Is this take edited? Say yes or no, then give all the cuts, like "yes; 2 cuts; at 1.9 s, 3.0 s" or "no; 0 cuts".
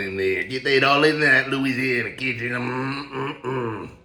no; 0 cuts